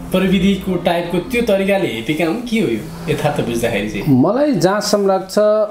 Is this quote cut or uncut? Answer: uncut